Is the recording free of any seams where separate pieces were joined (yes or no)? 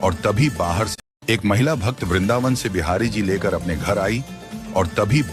no